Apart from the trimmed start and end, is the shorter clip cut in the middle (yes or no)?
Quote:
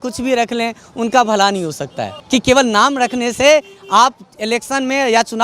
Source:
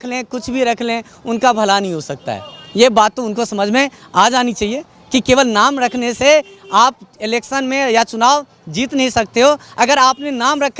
yes